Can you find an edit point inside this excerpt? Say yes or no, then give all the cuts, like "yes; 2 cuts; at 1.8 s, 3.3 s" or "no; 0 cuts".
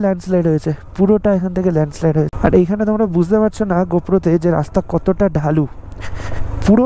no; 0 cuts